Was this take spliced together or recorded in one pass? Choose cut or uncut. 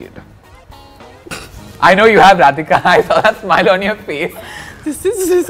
uncut